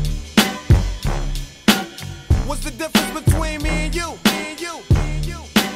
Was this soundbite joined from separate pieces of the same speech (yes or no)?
yes